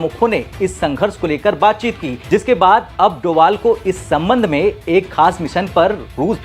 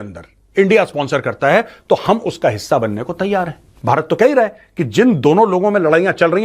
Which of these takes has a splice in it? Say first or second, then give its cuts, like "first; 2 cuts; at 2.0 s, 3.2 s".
second; 1 cut; at 3.7 s